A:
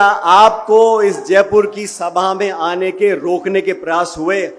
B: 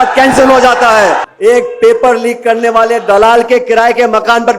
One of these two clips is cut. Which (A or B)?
B